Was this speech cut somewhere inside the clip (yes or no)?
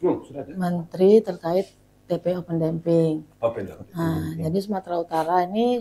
no